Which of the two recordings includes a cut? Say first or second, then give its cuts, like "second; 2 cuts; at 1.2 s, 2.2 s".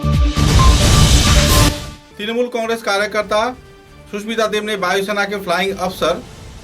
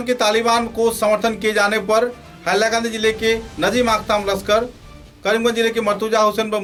first; 1 cut; at 1.9 s